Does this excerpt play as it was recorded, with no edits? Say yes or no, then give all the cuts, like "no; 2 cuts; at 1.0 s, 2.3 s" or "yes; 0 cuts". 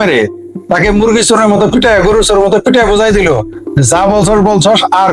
yes; 0 cuts